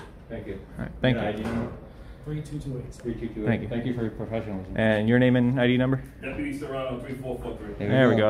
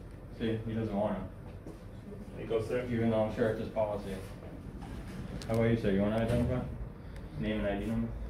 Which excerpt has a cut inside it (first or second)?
second